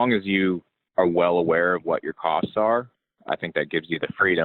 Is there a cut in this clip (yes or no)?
no